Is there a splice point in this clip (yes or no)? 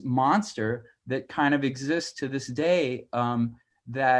no